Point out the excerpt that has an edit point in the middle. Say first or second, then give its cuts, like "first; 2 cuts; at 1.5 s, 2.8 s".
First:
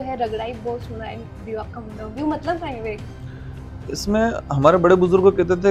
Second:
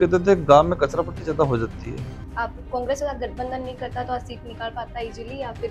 second; 1 cut; at 2.1 s